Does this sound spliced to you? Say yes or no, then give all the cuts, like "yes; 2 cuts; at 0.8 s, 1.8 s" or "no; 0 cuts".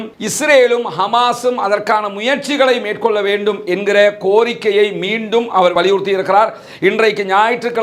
no; 0 cuts